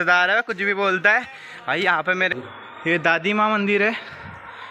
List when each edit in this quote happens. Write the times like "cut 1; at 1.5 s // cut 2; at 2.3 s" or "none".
cut 1; at 2.3 s